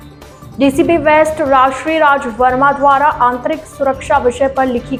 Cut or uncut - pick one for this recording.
uncut